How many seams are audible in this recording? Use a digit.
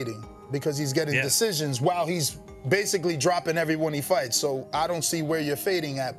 0